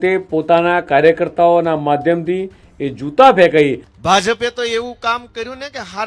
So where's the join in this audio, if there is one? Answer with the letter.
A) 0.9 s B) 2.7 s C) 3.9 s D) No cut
C